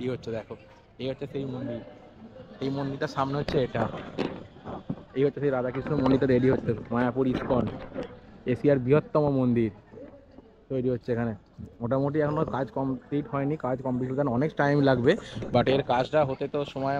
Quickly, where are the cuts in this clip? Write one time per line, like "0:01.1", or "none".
none